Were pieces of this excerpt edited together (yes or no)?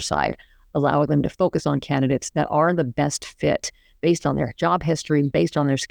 no